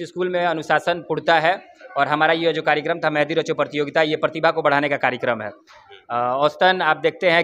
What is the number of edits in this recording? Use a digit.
0